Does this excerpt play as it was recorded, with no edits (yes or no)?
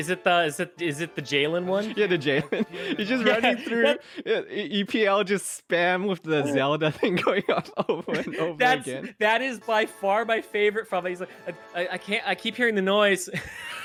yes